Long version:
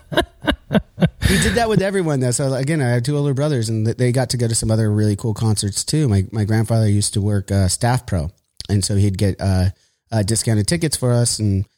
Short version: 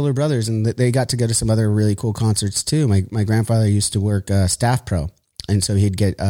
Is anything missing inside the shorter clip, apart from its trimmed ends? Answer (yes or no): no